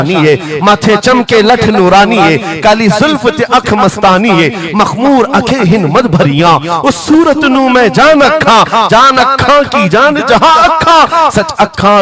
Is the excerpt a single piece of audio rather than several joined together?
yes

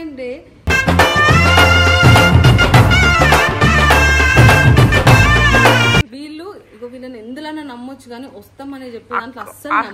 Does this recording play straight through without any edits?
no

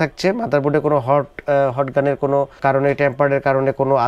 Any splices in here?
no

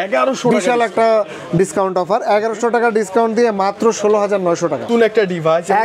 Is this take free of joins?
no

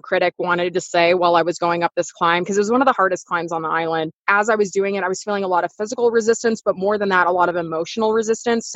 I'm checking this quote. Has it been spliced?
yes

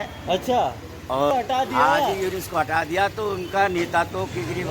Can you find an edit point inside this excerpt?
yes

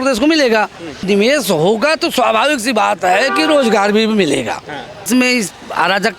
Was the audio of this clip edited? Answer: yes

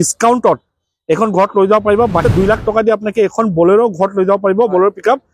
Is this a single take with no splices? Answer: no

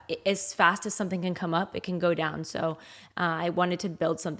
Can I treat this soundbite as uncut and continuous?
yes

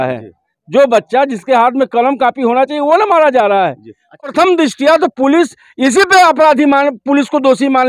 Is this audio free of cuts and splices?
no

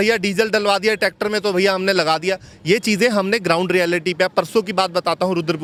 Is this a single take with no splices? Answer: yes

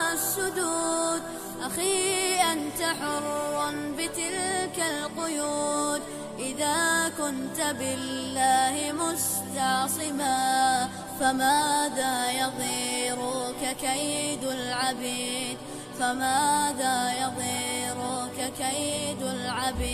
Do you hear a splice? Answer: no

